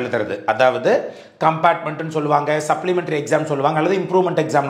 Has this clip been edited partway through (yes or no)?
no